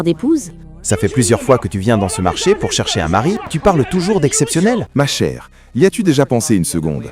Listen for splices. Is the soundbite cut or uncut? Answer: cut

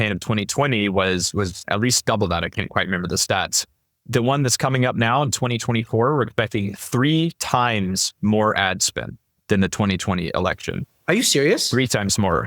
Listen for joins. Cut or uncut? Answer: cut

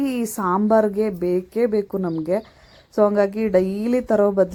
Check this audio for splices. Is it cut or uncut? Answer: uncut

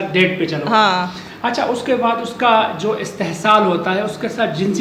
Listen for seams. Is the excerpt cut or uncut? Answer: uncut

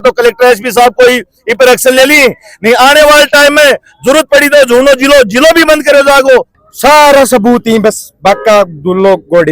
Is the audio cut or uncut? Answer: cut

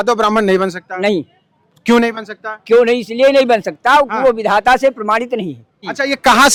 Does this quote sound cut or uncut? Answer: uncut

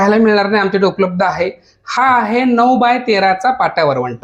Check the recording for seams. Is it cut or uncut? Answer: uncut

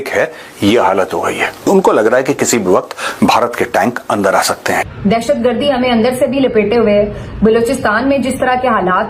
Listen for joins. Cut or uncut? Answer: cut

